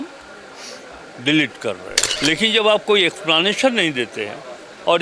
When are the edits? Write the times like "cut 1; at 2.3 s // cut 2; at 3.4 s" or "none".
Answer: cut 1; at 1.9 s